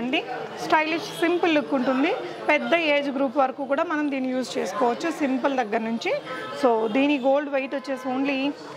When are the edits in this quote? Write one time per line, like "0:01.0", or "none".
none